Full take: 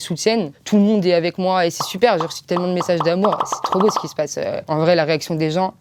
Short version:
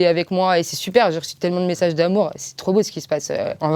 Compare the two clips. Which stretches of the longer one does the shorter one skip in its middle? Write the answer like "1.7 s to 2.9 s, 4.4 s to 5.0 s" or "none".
none